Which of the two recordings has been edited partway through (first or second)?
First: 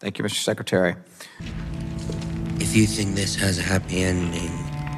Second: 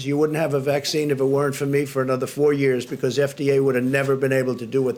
first